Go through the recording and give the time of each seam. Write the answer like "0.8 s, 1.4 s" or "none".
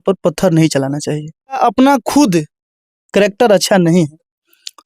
1.6 s